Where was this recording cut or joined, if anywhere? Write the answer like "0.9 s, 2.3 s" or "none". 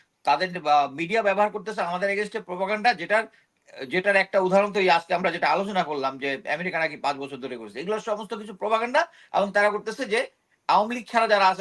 none